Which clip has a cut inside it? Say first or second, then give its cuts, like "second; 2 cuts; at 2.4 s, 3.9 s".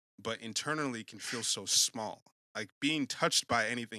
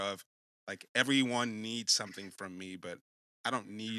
first; 1 cut; at 2.3 s